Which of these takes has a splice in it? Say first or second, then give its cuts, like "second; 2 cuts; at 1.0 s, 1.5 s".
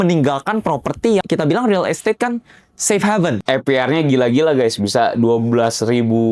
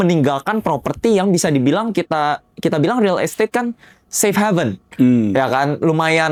first; 2 cuts; at 1.2 s, 3.4 s